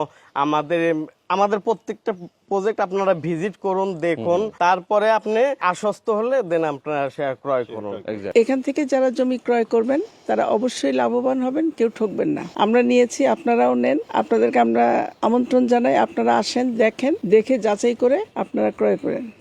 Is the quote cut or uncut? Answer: cut